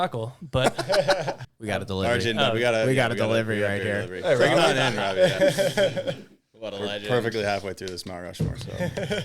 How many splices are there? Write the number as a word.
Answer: one